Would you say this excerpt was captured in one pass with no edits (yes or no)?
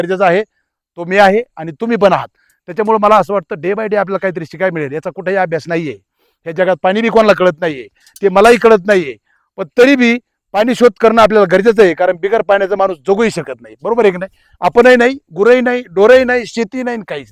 yes